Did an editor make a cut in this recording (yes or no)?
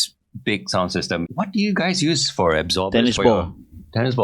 yes